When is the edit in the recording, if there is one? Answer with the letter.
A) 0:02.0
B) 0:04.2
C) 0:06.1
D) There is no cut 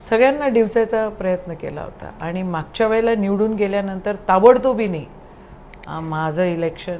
D